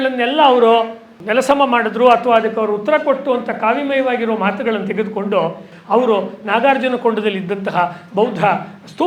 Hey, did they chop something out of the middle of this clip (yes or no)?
yes